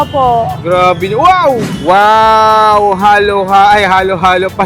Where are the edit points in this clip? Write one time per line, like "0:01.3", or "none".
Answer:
0:01.7